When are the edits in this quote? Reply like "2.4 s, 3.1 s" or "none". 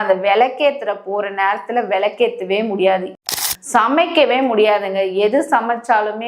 3.2 s